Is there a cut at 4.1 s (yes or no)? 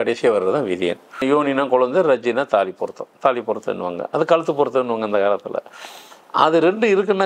no